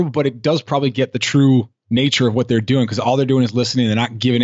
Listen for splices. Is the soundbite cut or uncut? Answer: uncut